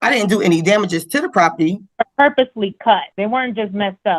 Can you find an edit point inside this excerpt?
yes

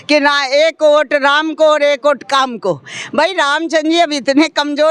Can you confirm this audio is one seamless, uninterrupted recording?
yes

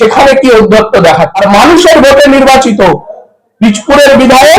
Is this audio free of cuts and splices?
no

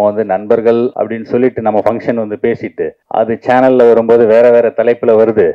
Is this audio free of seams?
no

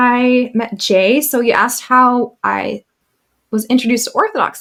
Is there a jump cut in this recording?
no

